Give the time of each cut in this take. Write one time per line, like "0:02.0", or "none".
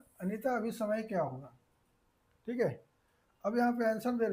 none